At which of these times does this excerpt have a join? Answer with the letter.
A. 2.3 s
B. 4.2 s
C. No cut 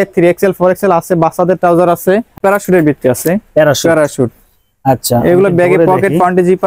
A